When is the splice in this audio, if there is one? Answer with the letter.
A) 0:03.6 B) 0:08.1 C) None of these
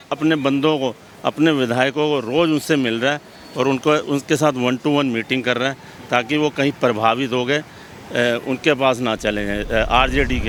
C